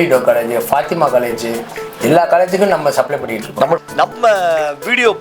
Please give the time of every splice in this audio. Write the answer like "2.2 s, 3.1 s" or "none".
3.5 s